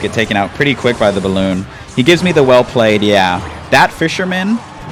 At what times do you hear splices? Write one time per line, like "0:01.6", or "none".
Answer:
none